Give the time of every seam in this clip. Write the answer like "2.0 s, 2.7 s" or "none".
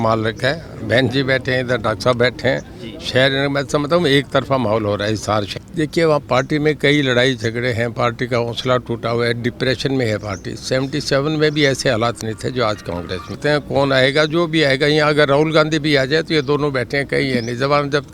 5.6 s, 13.4 s